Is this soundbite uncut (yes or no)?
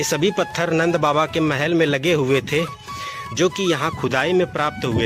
yes